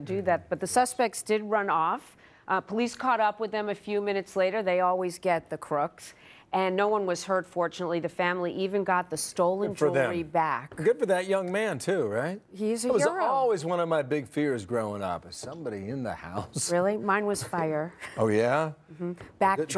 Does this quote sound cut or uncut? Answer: uncut